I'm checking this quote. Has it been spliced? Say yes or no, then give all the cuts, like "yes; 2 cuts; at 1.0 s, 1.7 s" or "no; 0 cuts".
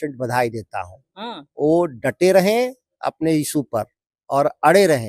no; 0 cuts